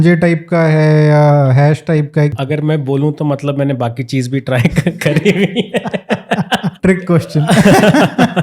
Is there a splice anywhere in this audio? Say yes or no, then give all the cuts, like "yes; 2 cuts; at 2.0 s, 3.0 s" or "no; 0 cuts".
yes; 2 cuts; at 2.3 s, 6.8 s